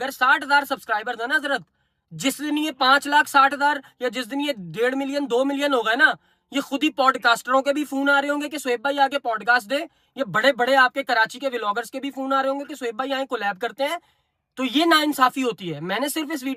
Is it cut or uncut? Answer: uncut